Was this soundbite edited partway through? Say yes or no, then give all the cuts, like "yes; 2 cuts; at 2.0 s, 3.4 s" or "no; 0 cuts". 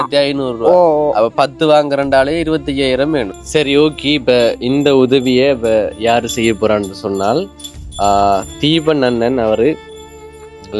yes; 1 cut; at 3.3 s